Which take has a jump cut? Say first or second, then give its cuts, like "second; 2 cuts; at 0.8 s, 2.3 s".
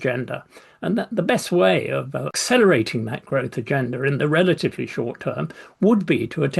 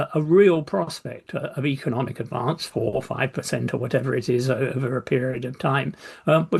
first; 1 cut; at 2.3 s